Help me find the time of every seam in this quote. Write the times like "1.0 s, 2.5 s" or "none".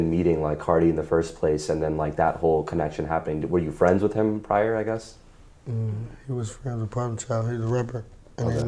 none